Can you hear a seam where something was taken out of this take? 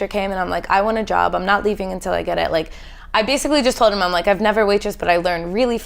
no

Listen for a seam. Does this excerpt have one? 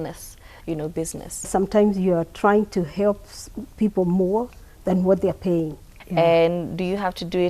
yes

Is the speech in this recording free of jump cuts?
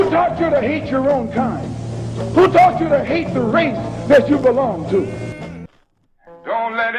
no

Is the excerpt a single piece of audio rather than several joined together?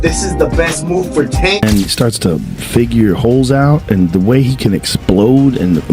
no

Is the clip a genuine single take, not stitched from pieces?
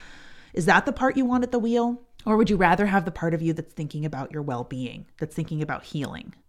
no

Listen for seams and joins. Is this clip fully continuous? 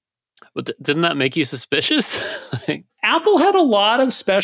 no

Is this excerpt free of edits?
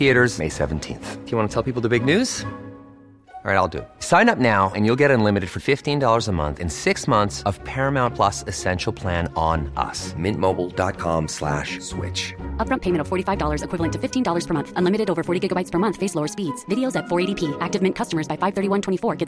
yes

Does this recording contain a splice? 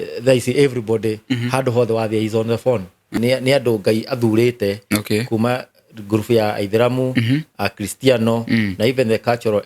yes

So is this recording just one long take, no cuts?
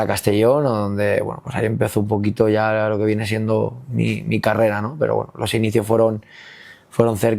yes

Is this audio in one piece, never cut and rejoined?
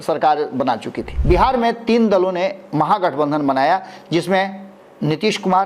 no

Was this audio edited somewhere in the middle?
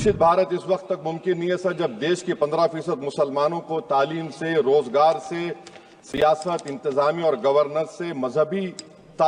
no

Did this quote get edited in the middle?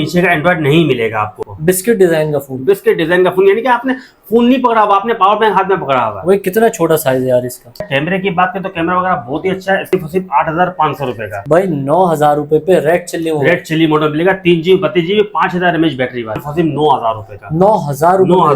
yes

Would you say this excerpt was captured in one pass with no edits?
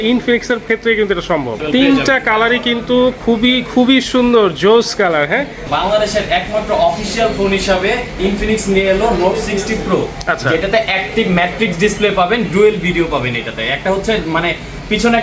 no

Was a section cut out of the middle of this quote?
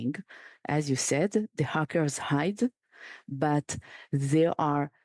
no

